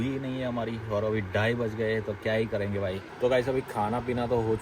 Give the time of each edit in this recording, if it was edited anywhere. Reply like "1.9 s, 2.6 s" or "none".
3.0 s